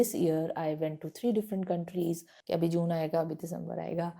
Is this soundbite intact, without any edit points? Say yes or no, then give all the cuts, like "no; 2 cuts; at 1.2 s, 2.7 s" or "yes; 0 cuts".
no; 1 cut; at 2.3 s